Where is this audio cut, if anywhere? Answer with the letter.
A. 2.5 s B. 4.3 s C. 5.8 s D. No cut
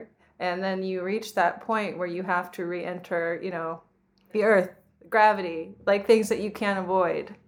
B